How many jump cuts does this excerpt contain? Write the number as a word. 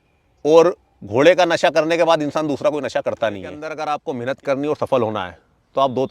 one